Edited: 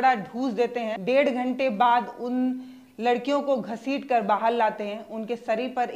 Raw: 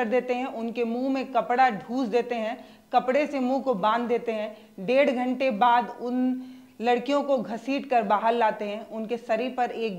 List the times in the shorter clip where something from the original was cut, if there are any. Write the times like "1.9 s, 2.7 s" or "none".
0.9 s